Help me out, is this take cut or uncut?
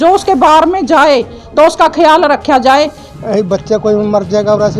cut